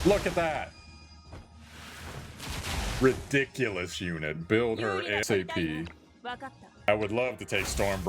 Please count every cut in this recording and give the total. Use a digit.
1